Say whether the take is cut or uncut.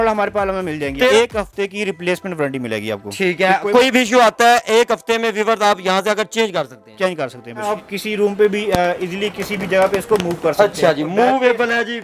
cut